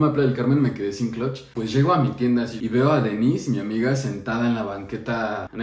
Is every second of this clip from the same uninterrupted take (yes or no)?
no